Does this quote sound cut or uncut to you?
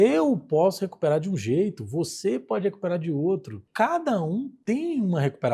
cut